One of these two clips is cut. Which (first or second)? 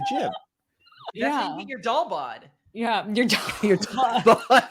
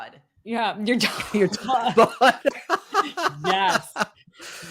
first